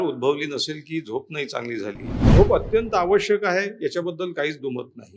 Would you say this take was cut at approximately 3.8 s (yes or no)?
no